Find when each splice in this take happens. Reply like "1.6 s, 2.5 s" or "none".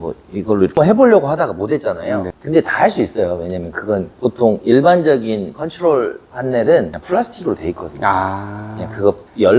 none